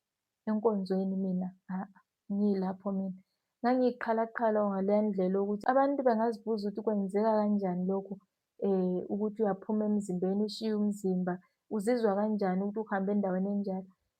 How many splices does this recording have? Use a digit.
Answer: 1